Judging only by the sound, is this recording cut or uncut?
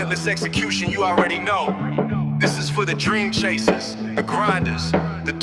uncut